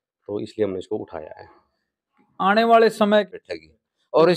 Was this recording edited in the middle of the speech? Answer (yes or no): yes